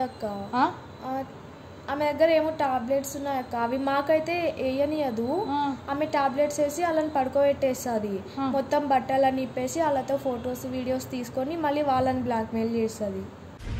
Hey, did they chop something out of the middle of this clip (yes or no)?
no